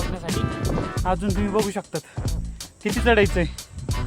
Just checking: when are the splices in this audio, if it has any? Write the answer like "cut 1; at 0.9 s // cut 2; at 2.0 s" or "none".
cut 1; at 0.9 s